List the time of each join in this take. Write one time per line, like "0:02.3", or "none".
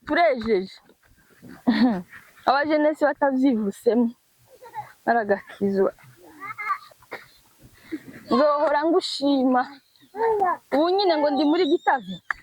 0:06.8